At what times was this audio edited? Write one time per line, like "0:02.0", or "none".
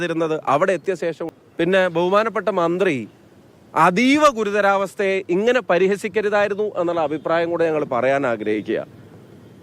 0:01.2